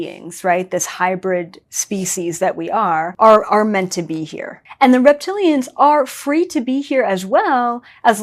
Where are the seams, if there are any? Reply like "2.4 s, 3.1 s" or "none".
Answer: 3.1 s, 4.6 s